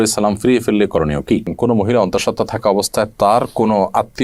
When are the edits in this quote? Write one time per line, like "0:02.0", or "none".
0:01.5